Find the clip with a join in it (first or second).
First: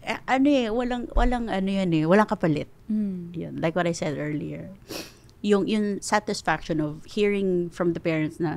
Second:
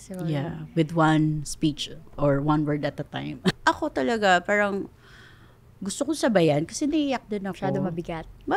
second